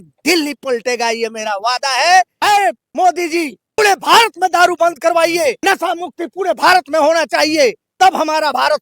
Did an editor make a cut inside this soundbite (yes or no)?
yes